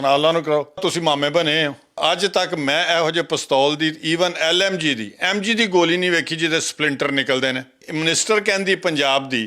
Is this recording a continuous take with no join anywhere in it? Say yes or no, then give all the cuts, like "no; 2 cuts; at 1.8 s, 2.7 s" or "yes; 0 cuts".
no; 3 cuts; at 0.8 s, 2.0 s, 7.8 s